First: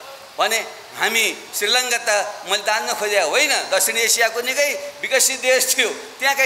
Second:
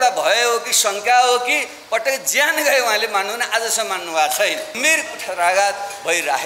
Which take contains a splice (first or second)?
second